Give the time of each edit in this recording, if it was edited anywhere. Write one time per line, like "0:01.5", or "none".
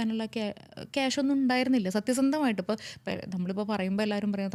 none